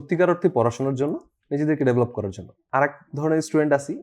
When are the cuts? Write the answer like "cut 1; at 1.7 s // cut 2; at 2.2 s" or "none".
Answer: cut 1; at 2.6 s